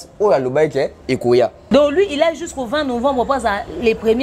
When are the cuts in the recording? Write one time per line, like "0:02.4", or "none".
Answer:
0:01.6

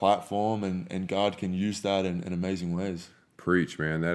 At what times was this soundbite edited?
none

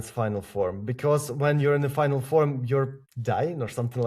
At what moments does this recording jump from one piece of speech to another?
0:03.1

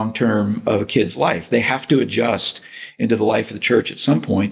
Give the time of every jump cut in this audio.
none

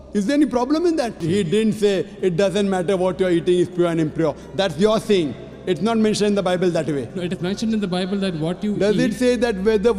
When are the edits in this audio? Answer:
0:01.2

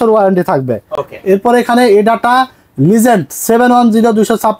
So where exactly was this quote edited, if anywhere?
none

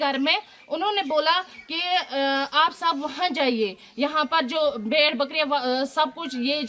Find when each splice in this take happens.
none

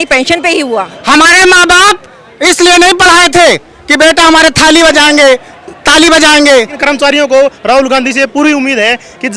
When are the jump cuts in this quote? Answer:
0:00.9
0:06.8

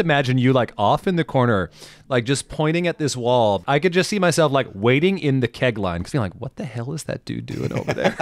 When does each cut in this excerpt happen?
0:03.6
0:06.0

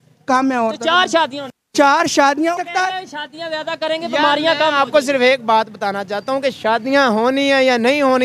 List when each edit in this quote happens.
0:02.6

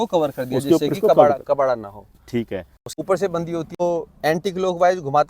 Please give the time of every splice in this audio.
0:02.8
0:03.8

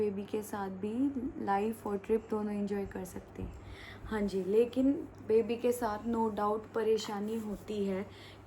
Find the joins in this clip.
none

